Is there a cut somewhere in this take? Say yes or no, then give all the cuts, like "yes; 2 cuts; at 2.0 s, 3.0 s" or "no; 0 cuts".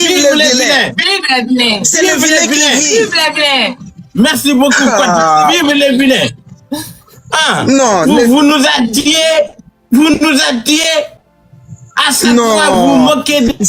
no; 0 cuts